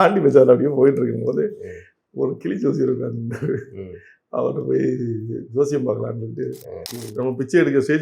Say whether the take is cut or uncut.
cut